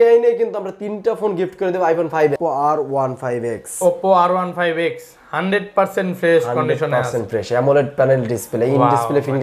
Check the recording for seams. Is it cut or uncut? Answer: cut